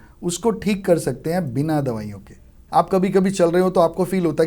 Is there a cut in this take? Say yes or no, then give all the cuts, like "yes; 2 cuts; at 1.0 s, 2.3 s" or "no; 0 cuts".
yes; 1 cut; at 2.6 s